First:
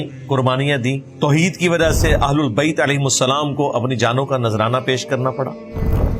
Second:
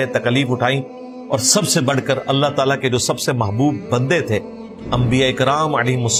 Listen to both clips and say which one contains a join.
first; 1 cut; at 1.1 s

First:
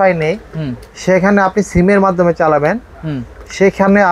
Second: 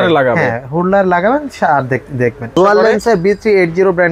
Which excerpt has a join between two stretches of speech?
second; 1 cut; at 2.5 s

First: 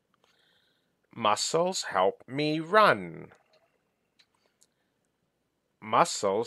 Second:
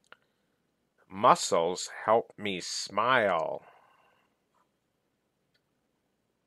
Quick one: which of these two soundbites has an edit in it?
first; 1 cut; at 4.2 s

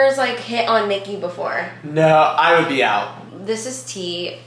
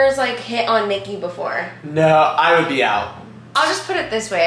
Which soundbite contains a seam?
first; 1 cut; at 3.3 s

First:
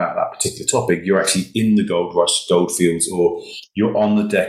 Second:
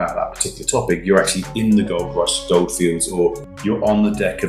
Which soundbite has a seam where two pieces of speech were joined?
second; 1 cut; at 3.5 s

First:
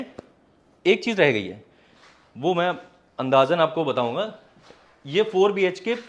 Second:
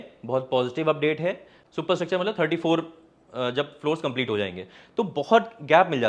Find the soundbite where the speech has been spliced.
second; 1 cut; at 1.5 s

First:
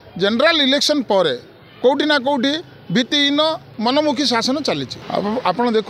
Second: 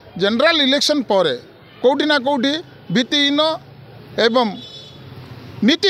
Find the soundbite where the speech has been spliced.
first; 2 cuts; at 3.7 s, 4.9 s

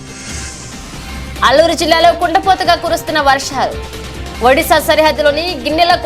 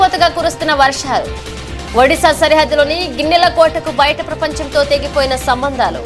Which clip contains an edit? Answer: first; 1 cut; at 1.0 s

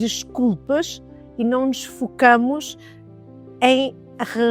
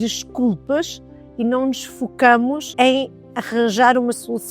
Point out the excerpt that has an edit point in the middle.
second; 1 cut; at 2.7 s

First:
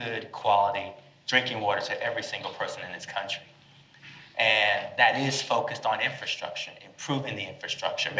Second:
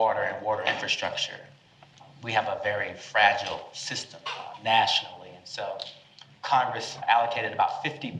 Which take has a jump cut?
second; 3 cuts; at 2.0 s, 4.4 s, 6.9 s

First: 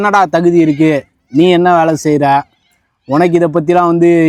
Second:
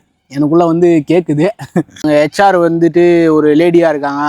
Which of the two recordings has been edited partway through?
second; 1 cut; at 2.0 s

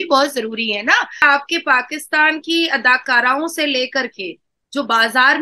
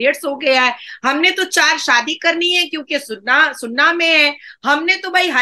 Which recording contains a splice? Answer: first; 1 cut; at 1.2 s

